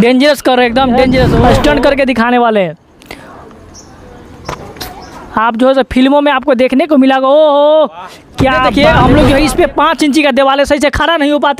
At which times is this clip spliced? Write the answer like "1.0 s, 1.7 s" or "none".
1.4 s, 8.7 s